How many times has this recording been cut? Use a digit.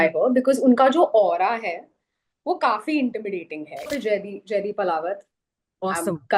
1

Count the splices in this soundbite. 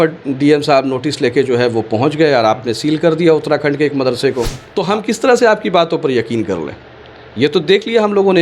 1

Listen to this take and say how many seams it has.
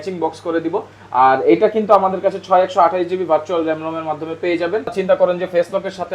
1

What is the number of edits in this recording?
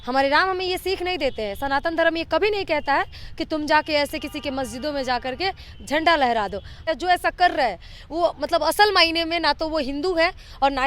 1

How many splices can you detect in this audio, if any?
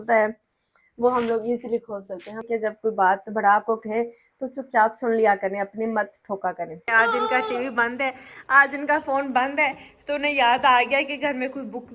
2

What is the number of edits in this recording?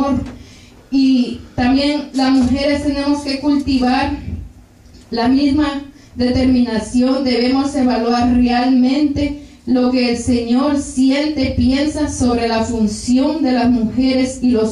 1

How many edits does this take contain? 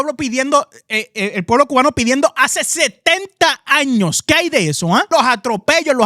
1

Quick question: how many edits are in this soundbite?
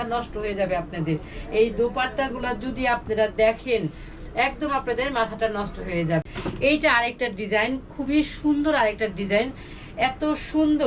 1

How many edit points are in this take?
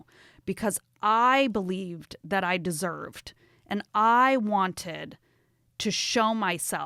0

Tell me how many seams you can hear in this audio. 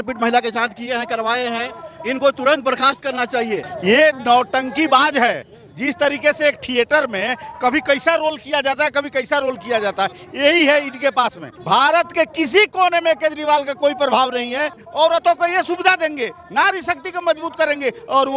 3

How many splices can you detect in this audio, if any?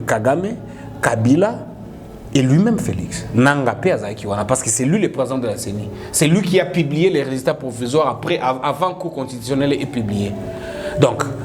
0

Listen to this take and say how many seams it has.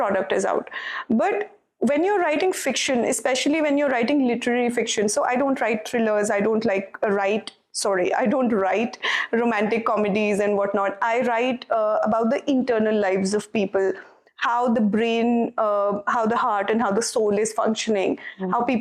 0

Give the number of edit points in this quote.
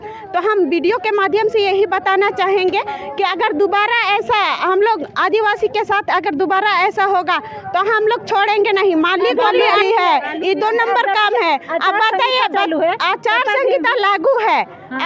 1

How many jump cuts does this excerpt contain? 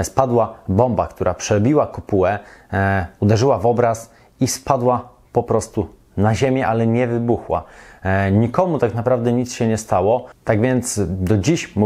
0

